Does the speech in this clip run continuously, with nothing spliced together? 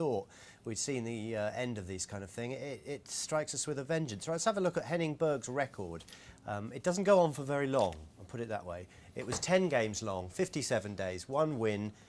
no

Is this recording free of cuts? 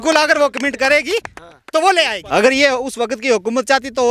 no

